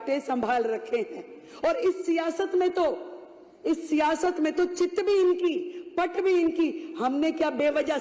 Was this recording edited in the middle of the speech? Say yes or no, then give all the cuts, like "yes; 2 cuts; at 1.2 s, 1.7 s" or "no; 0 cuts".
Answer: no; 0 cuts